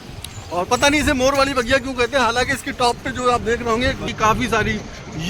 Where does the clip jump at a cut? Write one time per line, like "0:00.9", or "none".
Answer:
0:04.0